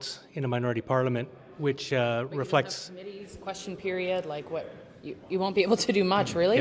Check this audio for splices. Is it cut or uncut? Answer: cut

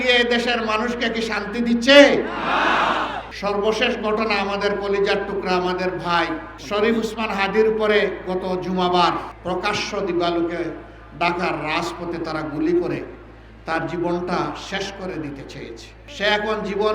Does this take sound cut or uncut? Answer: cut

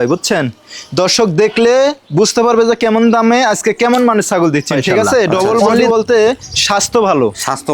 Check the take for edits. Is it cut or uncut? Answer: cut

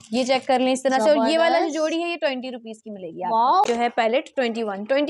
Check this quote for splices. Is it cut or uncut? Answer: cut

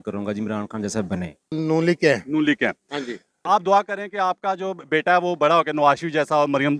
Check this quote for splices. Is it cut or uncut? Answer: cut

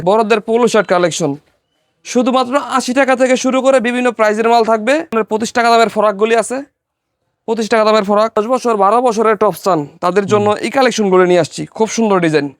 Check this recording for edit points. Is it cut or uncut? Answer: cut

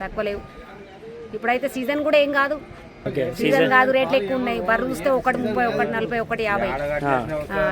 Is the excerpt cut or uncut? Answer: cut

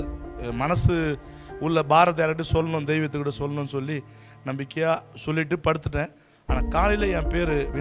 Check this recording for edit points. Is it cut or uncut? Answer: uncut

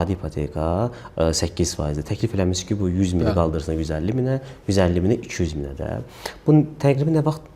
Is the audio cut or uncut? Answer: uncut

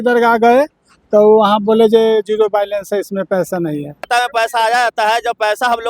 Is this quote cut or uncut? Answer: cut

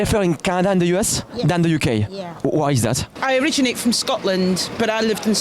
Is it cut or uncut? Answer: cut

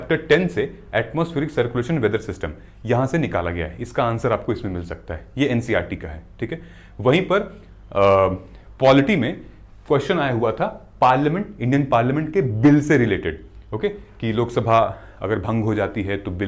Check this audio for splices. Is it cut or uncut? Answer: uncut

